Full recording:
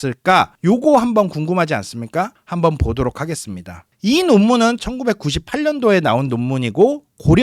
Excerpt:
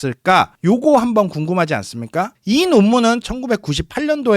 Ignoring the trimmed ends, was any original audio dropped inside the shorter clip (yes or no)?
yes